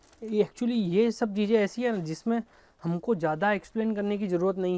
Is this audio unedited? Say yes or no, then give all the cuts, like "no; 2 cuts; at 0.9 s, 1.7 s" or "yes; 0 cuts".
yes; 0 cuts